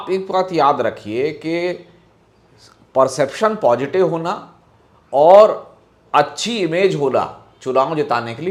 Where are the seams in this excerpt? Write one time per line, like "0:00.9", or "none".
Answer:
none